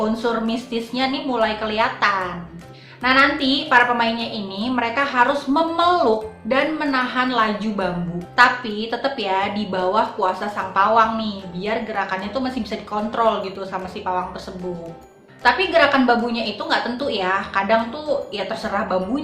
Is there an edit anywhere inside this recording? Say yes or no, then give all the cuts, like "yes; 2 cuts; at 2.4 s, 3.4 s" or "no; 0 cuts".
no; 0 cuts